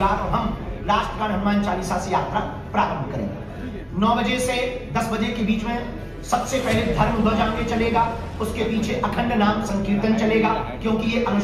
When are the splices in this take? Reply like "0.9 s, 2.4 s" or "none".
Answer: none